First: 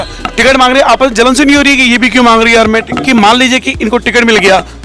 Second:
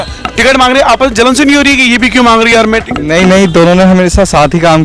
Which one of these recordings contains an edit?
first; 1 cut; at 2.5 s

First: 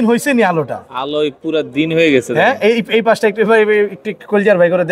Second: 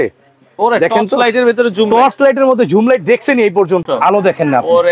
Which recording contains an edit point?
second; 1 cut; at 3.8 s

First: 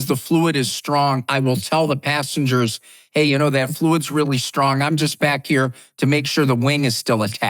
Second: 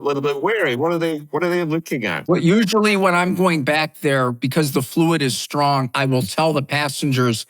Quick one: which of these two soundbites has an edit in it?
second; 1 cut; at 2.3 s

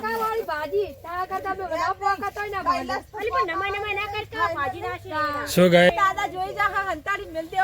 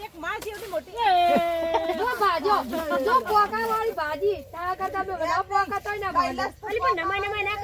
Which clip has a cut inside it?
first; 1 cut; at 5.9 s

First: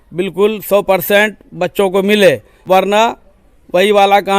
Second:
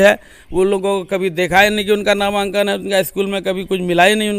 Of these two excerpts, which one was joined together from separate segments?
first; 1 cut; at 2.5 s

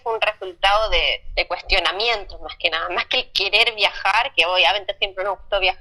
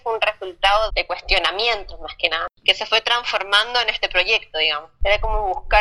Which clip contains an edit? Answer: second; 3 cuts; at 0.9 s, 2.5 s, 5.0 s

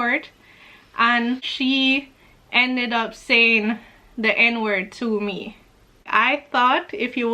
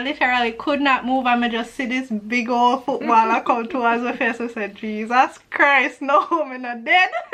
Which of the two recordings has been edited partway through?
first; 2 cuts; at 1.5 s, 6.1 s

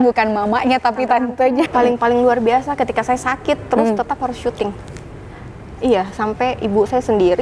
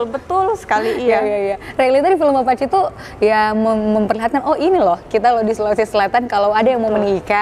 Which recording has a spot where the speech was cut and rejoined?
first; 1 cut; at 1.7 s

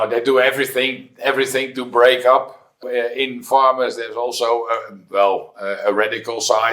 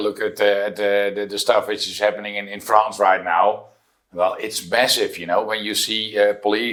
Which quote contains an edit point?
first; 1 cut; at 2.8 s

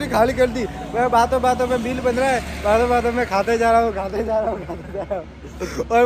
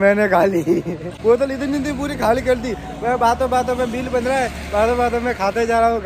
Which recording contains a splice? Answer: second; 1 cut; at 1.1 s

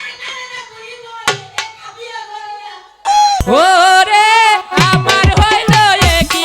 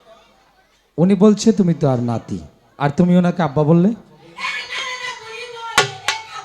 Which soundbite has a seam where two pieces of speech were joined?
first; 1 cut; at 3.4 s

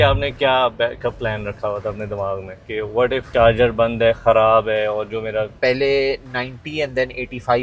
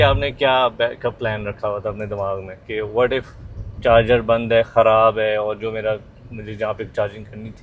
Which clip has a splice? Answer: first; 2 cuts; at 3.3 s, 5.6 s

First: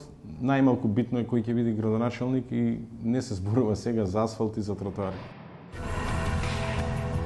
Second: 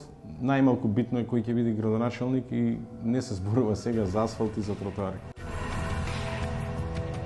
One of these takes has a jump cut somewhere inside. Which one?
second; 1 cut; at 5.3 s

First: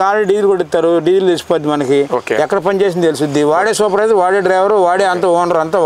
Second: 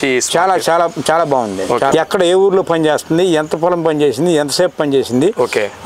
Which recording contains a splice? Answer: second; 1 cut; at 1.9 s

